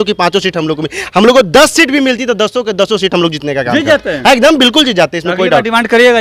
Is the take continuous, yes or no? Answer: yes